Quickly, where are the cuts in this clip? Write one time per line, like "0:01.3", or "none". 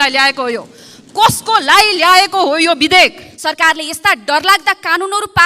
0:03.3